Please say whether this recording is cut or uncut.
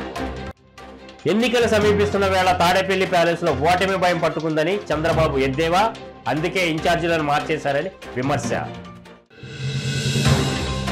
uncut